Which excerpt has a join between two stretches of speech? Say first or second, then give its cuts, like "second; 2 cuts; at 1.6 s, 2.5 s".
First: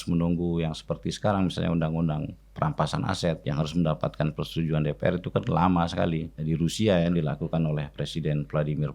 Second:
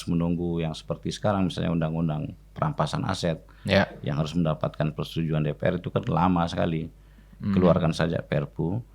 first; 2 cuts; at 3.4 s, 6.3 s